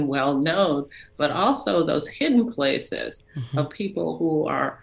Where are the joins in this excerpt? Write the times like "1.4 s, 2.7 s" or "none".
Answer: none